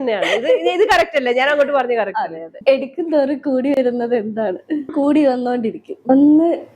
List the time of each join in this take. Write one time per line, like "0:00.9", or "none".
0:02.4
0:04.9
0:06.0